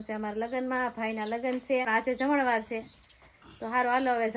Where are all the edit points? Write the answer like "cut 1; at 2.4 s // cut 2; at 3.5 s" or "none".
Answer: cut 1; at 1.9 s

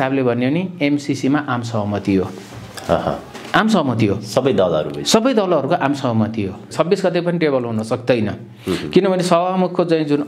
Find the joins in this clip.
cut 1; at 6.7 s

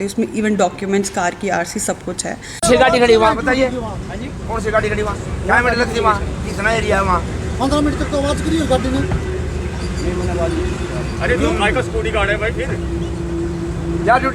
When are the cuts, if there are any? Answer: cut 1; at 2.6 s

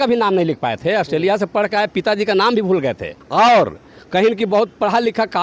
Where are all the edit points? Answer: cut 1; at 3.1 s

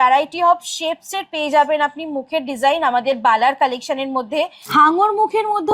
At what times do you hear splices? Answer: cut 1; at 4.6 s

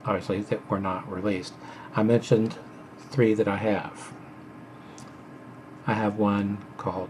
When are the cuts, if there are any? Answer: cut 1; at 5.2 s

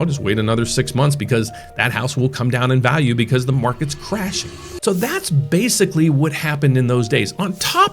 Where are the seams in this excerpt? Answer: cut 1; at 4.6 s

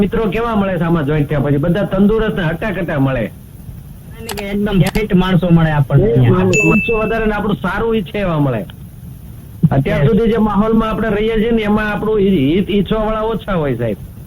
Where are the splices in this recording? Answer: cut 1; at 4.4 s // cut 2; at 6.6 s

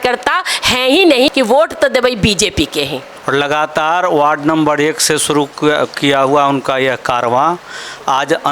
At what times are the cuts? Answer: cut 1; at 1.3 s // cut 2; at 3.1 s

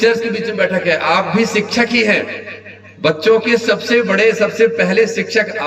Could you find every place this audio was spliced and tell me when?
none

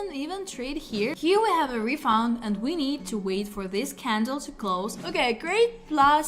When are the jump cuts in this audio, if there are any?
cut 1; at 1.1 s // cut 2; at 5.0 s

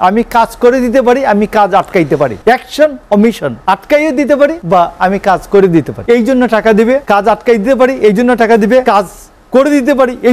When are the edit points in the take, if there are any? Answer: cut 1; at 2.4 s // cut 2; at 3.5 s // cut 3; at 4.6 s // cut 4; at 5.9 s // cut 5; at 7.0 s // cut 6; at 8.8 s

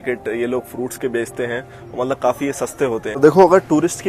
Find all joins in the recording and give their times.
cut 1; at 3.1 s

